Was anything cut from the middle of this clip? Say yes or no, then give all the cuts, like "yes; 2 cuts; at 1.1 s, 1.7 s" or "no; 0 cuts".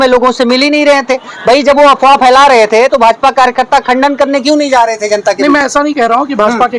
no; 0 cuts